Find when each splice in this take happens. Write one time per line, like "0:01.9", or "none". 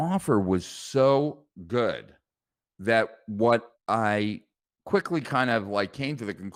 none